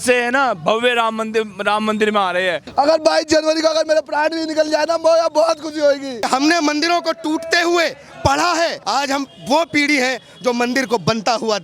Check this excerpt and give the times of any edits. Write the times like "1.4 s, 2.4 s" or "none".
2.6 s, 6.3 s, 8.8 s